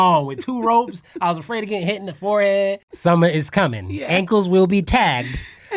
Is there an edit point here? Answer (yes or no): yes